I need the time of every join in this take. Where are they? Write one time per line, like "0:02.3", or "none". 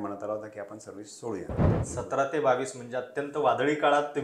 0:01.8